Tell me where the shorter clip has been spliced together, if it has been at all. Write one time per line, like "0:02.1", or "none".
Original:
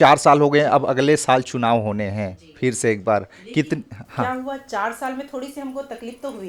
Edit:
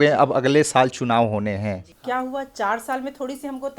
0:01.9